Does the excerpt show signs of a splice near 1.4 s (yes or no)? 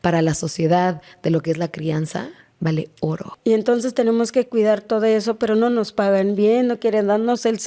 no